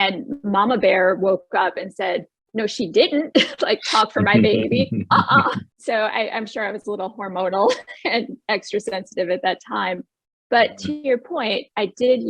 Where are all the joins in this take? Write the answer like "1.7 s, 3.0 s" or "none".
5.7 s